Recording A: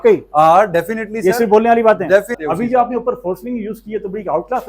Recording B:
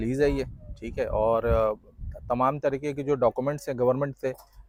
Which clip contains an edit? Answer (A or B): A